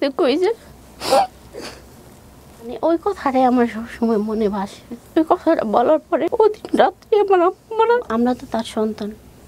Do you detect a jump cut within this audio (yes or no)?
yes